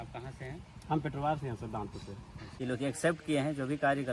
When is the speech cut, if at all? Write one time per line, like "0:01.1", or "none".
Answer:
0:02.4